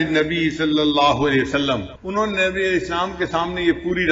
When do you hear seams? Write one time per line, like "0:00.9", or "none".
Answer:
0:02.0

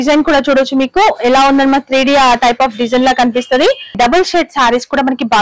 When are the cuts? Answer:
0:04.0

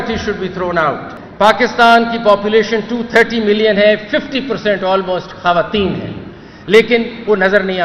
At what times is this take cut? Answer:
0:01.1

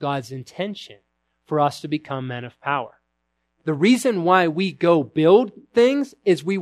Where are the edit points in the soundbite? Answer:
0:03.5

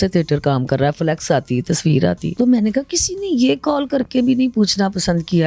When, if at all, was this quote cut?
0:02.3

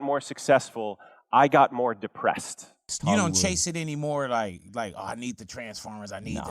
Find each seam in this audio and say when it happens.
0:02.9

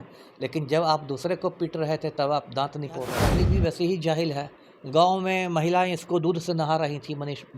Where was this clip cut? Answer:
0:03.3

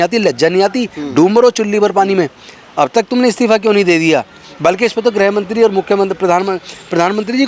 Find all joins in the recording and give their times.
none

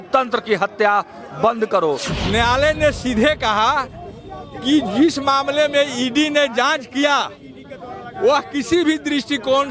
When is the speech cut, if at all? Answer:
0:02.1

